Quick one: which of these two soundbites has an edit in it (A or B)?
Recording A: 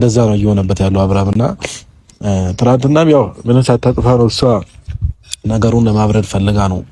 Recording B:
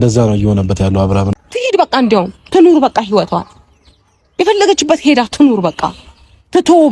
B